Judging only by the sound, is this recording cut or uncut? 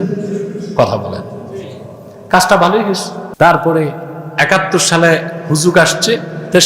cut